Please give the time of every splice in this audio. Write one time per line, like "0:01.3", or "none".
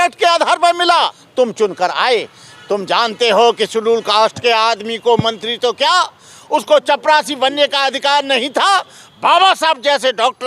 0:01.2